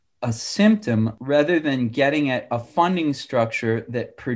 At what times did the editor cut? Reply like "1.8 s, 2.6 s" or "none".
1.1 s